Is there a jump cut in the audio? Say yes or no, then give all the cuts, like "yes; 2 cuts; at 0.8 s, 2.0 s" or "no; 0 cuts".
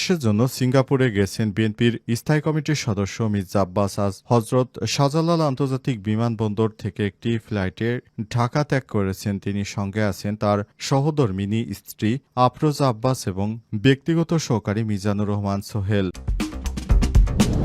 yes; 1 cut; at 16.2 s